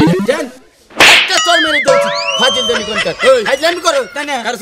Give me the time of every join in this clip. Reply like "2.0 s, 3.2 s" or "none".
none